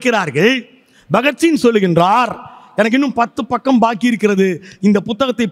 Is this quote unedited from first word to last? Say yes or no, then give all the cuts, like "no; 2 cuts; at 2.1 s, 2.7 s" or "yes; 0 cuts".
yes; 0 cuts